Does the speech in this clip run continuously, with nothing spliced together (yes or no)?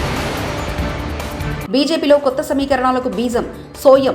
no